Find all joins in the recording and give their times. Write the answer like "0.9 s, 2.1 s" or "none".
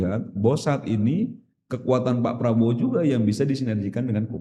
none